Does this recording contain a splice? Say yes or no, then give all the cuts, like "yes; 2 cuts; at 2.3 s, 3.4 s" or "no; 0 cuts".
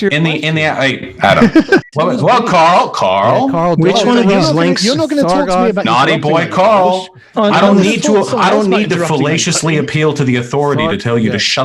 yes; 1 cut; at 1.9 s